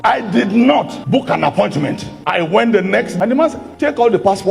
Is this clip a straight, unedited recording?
no; 1 cut; at 3.1 s

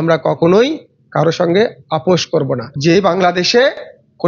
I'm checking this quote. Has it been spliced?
yes; 1 cut; at 2.7 s

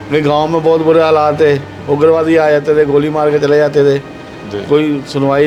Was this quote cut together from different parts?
no; 0 cuts

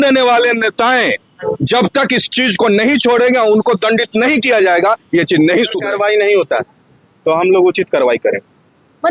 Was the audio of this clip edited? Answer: yes; 1 cut; at 5.8 s

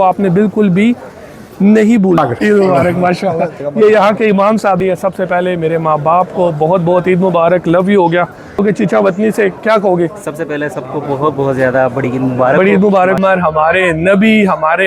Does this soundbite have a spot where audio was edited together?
yes; 4 cuts; at 2.2 s, 4.8 s, 8.6 s, 13.2 s

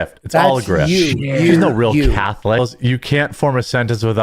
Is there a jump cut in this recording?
yes; 1 cut; at 2.6 s

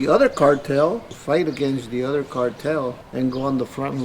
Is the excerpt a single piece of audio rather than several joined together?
no; 2 cuts; at 1.1 s, 3.0 s

